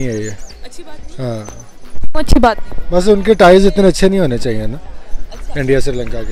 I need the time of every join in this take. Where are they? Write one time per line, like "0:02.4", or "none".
none